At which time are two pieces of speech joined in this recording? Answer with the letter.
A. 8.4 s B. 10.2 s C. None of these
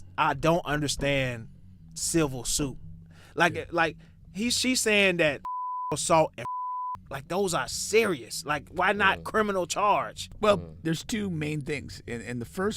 B